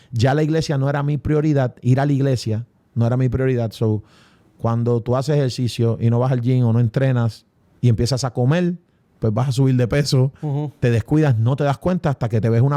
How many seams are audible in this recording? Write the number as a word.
zero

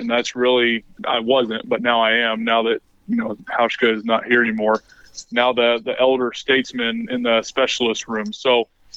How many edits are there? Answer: one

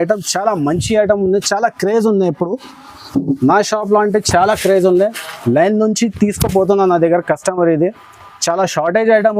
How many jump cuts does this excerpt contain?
zero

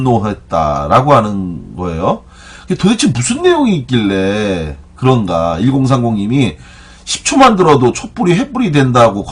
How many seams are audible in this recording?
one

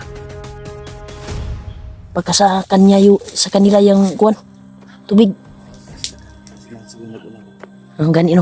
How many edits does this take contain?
one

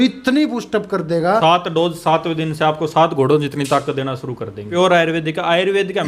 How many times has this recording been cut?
two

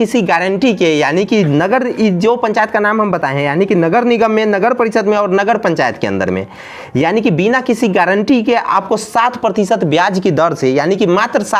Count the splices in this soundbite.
zero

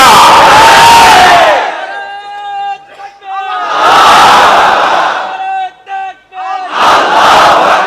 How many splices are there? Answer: zero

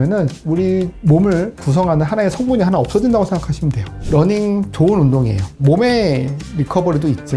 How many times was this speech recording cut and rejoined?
two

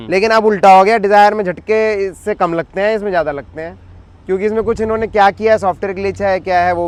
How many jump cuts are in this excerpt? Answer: zero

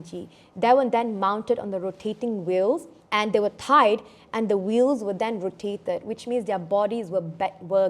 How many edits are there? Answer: one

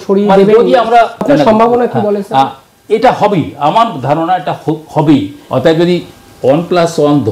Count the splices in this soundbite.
two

